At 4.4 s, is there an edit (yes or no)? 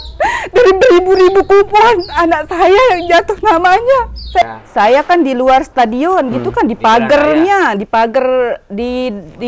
yes